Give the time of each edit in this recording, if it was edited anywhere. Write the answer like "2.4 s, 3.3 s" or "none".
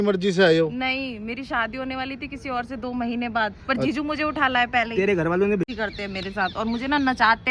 5.7 s